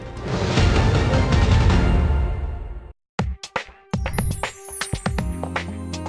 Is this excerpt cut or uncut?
cut